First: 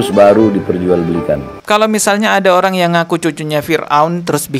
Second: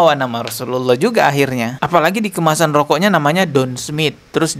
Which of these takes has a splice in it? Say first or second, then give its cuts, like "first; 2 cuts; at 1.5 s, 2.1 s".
first; 1 cut; at 1.5 s